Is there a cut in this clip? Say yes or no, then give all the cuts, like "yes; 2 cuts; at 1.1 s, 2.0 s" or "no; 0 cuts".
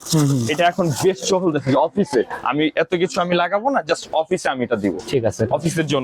no; 0 cuts